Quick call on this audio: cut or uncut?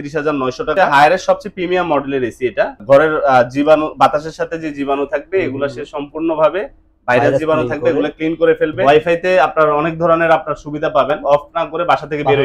cut